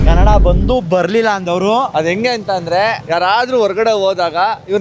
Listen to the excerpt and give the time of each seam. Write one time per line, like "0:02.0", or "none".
0:01.9